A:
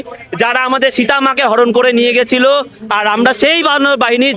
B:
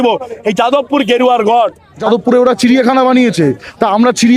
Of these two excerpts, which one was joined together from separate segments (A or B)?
B